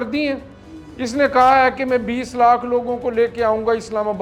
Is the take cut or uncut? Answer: uncut